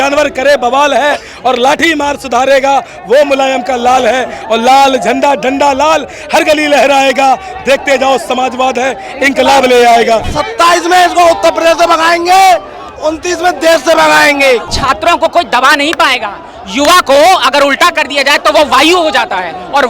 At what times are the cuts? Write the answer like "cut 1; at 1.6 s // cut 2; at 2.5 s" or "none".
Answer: cut 1; at 10.3 s // cut 2; at 14.7 s

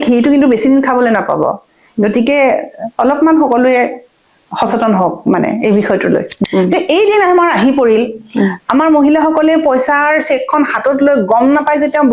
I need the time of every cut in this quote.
cut 1; at 6.3 s

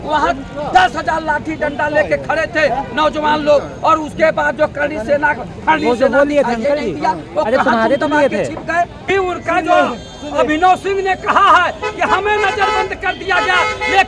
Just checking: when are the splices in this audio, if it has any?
cut 1; at 9.1 s

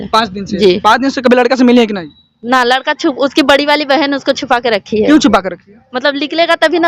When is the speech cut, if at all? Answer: none

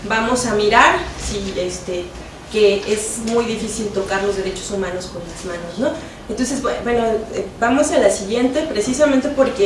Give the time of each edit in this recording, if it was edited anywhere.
cut 1; at 8.5 s

